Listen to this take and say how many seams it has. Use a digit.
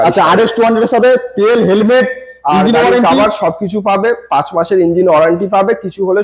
0